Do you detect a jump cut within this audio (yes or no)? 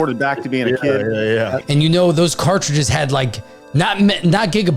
yes